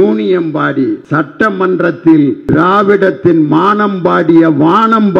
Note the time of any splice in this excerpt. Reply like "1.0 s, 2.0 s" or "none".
1.0 s, 2.4 s